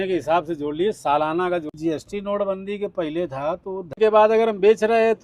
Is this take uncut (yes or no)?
no